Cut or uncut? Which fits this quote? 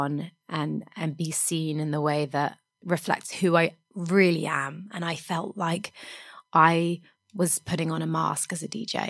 cut